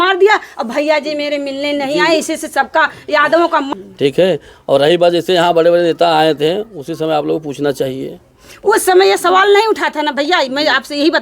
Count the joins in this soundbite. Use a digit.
1